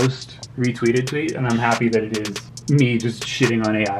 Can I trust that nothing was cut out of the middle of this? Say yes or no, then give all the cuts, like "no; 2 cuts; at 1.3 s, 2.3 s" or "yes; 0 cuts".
no; 1 cut; at 2.4 s